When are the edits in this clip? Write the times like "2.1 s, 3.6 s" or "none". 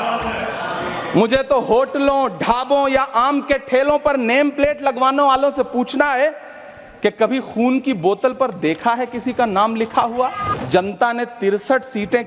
10.5 s